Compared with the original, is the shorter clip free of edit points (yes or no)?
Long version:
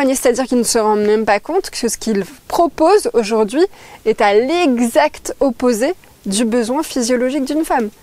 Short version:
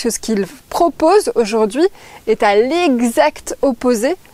yes